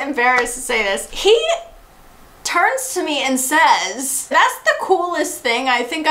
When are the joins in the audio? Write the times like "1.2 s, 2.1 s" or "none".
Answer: 1.1 s